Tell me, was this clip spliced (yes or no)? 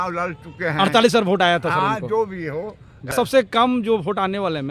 yes